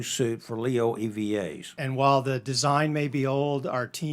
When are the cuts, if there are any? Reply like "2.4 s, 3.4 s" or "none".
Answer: 1.7 s